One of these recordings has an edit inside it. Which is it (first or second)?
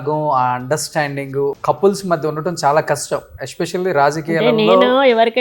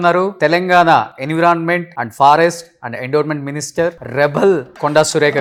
first